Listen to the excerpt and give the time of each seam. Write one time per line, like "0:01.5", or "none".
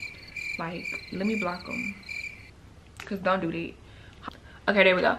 0:04.1